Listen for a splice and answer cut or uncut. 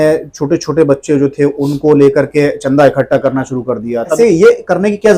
cut